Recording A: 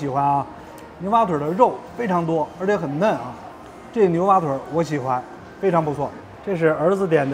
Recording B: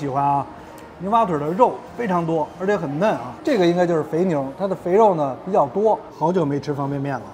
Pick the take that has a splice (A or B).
B